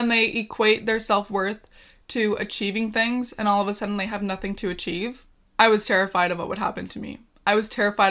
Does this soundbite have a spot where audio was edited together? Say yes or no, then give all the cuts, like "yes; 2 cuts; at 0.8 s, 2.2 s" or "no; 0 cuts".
no; 0 cuts